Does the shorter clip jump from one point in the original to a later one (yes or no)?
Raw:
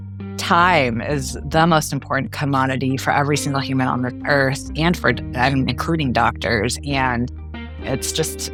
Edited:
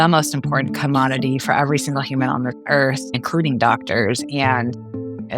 yes